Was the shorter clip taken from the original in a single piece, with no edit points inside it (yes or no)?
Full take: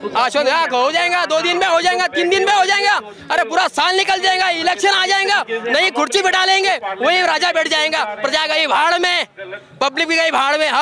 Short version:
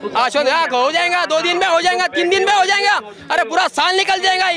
yes